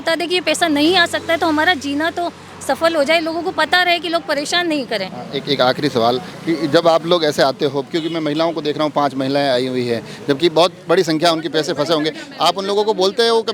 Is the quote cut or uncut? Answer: uncut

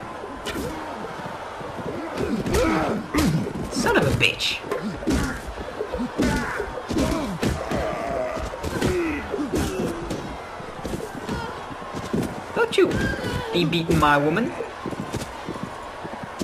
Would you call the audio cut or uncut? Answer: uncut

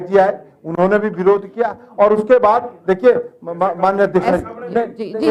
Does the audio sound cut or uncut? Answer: uncut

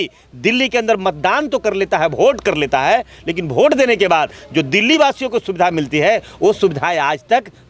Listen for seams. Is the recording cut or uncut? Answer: uncut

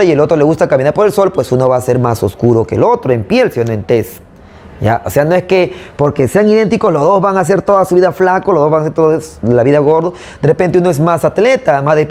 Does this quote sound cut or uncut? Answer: uncut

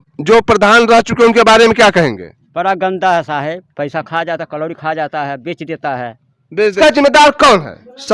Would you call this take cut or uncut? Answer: cut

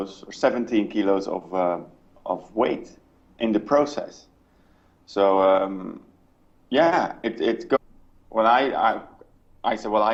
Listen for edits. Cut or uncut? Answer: uncut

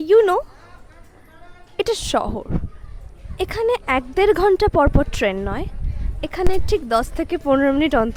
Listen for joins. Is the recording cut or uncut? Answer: uncut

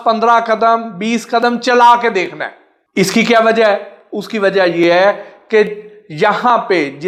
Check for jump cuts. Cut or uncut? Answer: uncut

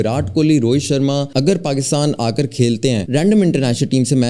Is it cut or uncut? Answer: cut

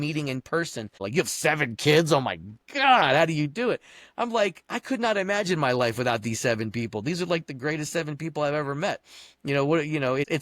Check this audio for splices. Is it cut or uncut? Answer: cut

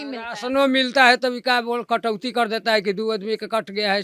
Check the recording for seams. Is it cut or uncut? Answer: uncut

